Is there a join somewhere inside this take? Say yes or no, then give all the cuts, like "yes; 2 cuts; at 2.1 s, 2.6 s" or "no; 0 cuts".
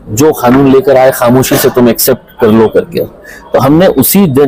no; 0 cuts